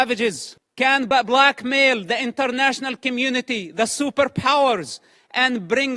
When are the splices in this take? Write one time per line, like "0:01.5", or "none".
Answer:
0:01.1

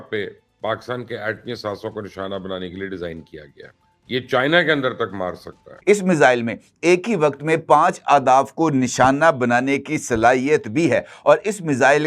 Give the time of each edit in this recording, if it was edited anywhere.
0:05.7

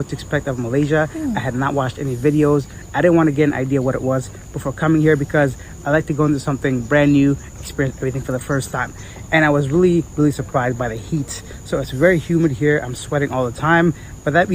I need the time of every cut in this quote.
none

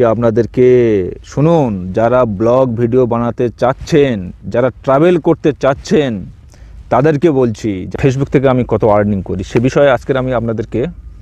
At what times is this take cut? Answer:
0:07.8

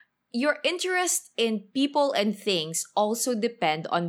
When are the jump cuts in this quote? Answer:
0:01.7

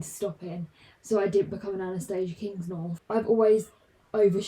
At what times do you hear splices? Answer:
0:03.0

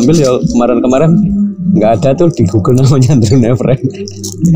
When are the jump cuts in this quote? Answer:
none

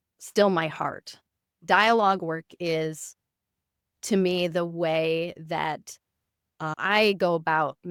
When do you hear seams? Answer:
none

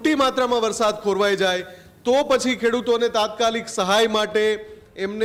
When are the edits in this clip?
none

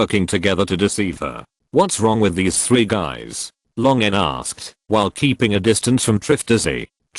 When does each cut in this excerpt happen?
0:02.3

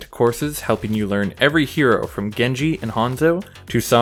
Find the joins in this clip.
none

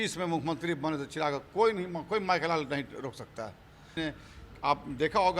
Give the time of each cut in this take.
0:04.0

